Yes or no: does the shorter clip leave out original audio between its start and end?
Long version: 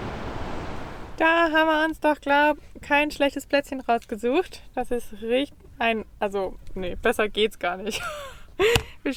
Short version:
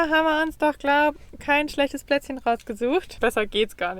yes